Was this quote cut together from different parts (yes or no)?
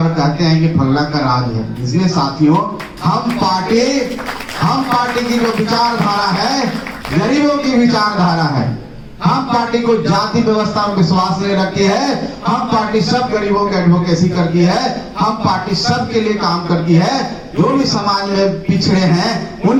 no